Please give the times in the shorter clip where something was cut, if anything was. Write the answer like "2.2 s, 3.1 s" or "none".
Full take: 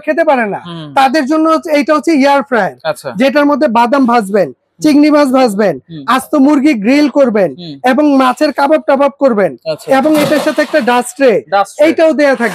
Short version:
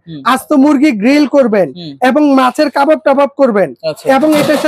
none